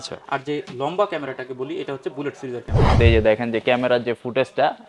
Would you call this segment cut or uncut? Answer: cut